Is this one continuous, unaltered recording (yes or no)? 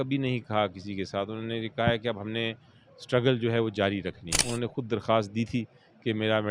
no